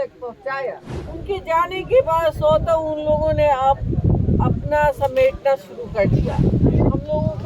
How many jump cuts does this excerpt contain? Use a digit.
1